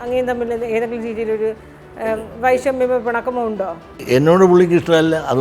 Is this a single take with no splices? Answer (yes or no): no